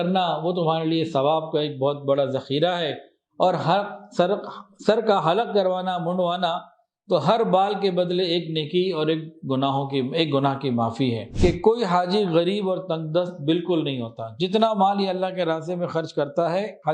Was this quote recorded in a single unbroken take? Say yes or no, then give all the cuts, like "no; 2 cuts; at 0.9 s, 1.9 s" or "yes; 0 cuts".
no; 1 cut; at 11.3 s